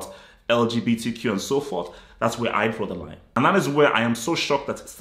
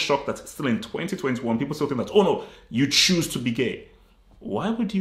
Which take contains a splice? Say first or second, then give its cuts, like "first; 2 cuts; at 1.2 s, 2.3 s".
first; 1 cut; at 3.4 s